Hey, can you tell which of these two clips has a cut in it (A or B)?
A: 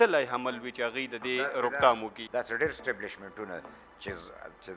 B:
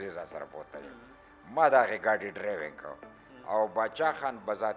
A